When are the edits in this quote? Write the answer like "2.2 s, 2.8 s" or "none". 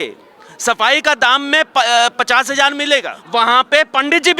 3.2 s

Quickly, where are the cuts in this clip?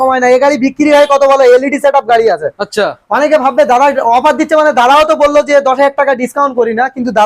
none

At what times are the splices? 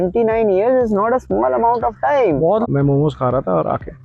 2.7 s

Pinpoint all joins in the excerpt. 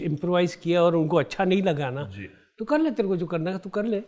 none

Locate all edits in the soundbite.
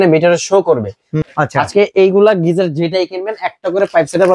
1.2 s

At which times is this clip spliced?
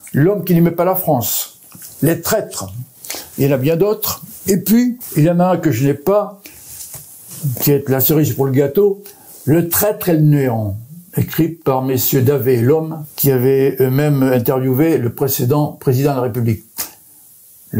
5.0 s, 13.0 s

